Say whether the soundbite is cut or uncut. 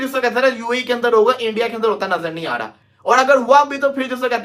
uncut